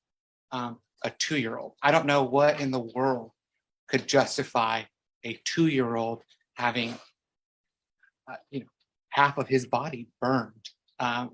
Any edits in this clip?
no; 0 cuts

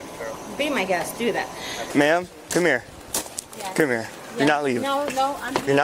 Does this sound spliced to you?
yes; 1 cut; at 1.8 s

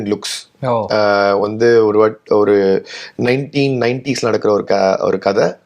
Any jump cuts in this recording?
no; 0 cuts

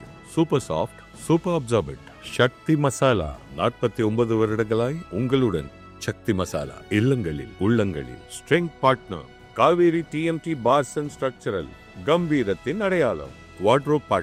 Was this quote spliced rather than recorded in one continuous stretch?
no; 0 cuts

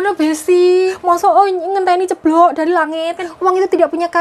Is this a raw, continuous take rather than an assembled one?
no; 2 cuts; at 0.9 s, 3.3 s

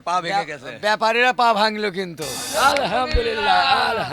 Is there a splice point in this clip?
yes; 1 cut; at 2.4 s

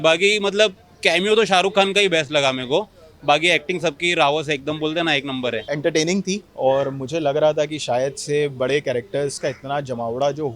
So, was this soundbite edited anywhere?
yes; 1 cut; at 5.6 s

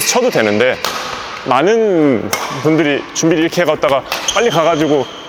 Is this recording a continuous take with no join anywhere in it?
yes; 0 cuts

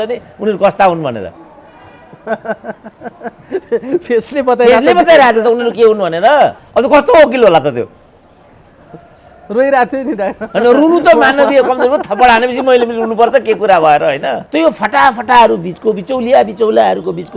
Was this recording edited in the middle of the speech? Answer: yes; 2 cuts; at 6.6 s, 14.4 s

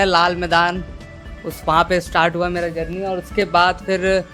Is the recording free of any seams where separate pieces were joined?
yes; 0 cuts

